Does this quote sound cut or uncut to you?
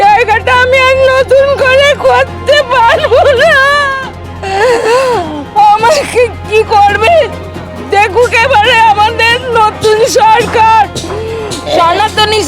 cut